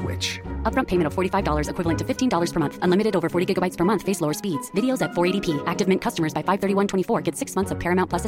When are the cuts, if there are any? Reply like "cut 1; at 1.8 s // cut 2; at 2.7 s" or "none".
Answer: none